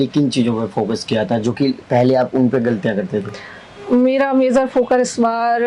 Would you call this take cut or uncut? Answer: uncut